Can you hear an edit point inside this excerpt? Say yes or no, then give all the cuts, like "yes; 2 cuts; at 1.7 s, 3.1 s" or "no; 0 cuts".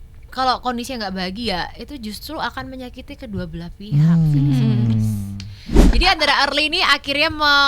yes; 1 cut; at 5.8 s